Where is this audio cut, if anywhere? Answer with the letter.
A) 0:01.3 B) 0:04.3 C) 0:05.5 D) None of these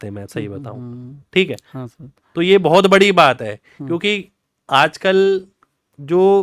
D